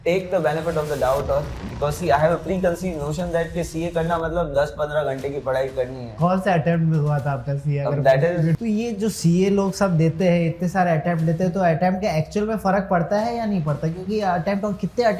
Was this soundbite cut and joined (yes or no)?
yes